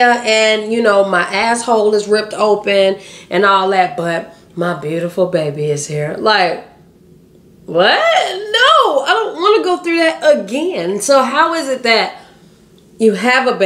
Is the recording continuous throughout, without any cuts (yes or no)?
yes